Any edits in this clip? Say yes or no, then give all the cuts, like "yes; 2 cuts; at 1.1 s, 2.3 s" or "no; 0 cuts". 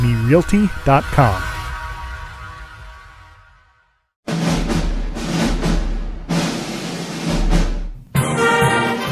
yes; 1 cut; at 4.1 s